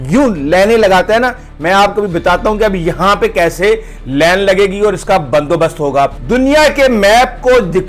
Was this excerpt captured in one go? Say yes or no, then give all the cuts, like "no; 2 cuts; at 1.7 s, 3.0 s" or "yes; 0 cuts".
no; 1 cut; at 6.2 s